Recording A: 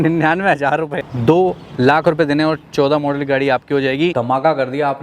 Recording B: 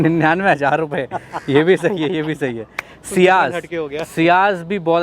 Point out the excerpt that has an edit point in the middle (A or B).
A